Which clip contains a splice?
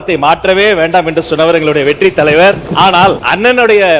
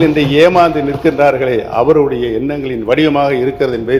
first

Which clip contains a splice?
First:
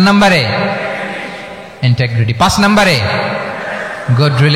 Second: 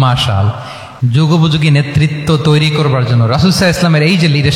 second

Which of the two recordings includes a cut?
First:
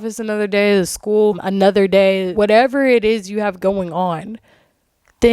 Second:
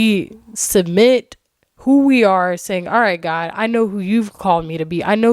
first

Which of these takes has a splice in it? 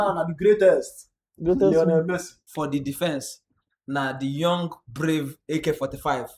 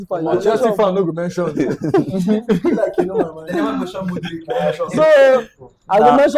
first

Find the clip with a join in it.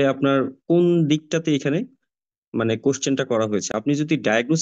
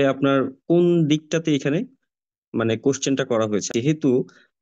second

